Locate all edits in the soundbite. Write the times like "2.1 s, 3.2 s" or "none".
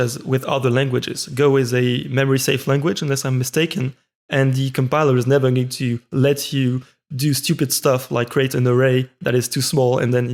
none

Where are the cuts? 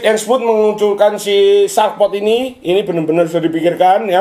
none

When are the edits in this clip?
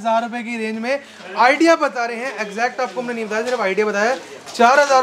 none

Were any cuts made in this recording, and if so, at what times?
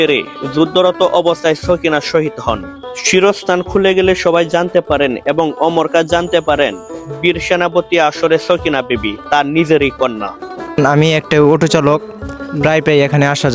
none

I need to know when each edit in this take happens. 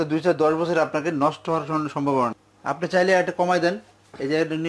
2.5 s

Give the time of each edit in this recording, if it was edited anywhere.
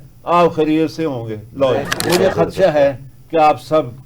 2.0 s

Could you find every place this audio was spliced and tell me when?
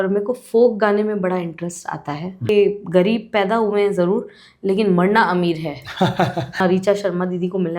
2.5 s, 6.6 s

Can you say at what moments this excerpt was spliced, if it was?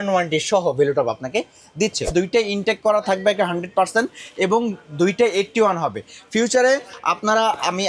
2.1 s

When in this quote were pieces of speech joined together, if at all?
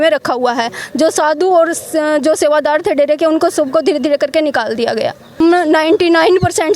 5.4 s

